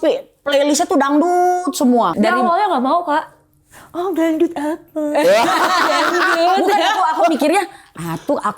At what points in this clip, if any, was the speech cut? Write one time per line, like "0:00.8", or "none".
0:02.1